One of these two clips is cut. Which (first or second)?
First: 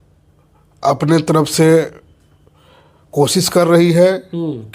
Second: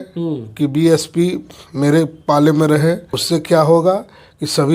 second